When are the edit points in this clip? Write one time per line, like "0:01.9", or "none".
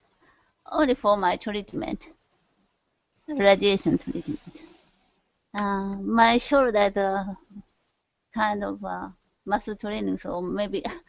0:01.2